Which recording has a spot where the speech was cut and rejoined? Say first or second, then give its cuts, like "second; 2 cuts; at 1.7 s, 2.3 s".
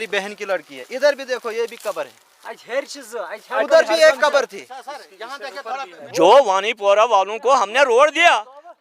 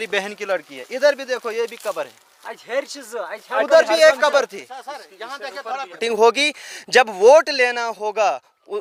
first; 1 cut; at 6.0 s